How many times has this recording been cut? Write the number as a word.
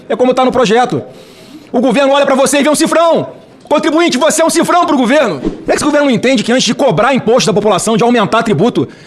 one